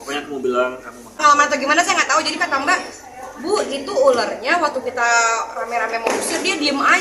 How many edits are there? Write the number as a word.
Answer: one